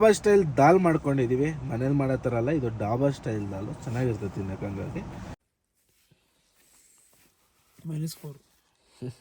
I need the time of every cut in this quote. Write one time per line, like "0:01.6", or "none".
0:05.3